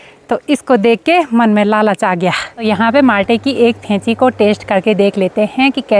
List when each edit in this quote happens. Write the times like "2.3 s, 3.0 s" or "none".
none